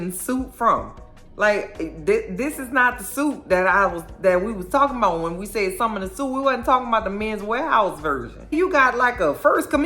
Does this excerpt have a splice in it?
yes; 1 cut; at 8.5 s

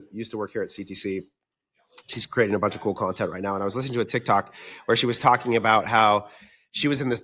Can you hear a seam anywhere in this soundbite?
no; 0 cuts

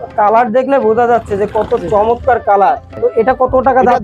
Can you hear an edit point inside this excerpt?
yes; 1 cut; at 2.9 s

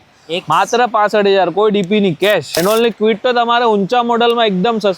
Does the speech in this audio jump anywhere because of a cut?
yes; 1 cut; at 2.6 s

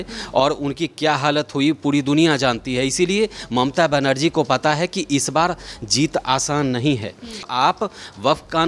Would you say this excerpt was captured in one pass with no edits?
no; 1 cut; at 7.4 s

